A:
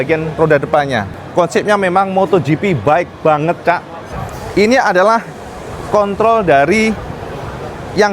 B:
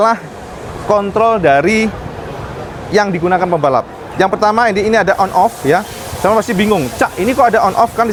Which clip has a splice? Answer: A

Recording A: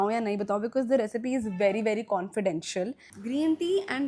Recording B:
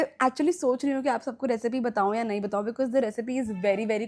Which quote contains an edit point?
A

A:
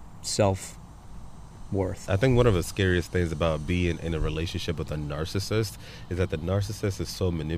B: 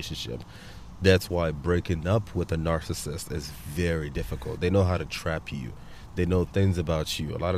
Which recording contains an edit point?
A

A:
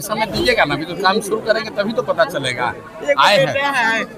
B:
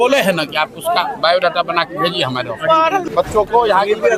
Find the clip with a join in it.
B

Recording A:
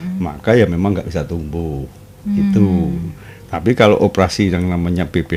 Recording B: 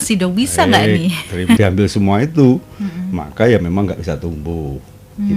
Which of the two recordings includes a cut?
B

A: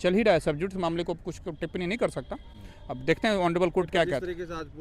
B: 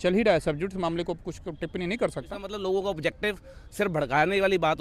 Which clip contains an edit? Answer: B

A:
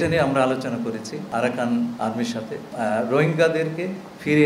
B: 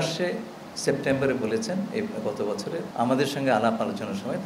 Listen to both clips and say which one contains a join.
A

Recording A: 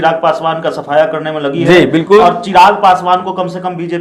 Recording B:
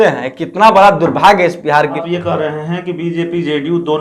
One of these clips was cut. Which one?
B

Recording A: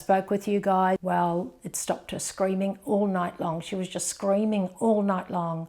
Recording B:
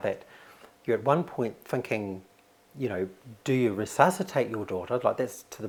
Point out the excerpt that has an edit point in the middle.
A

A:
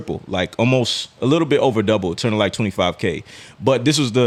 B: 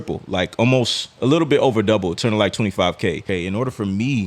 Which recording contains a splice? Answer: B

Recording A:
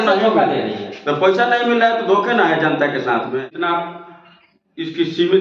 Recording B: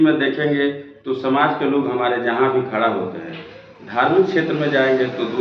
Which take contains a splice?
A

